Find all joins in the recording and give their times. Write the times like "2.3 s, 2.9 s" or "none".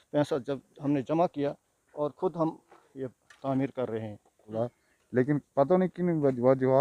4.5 s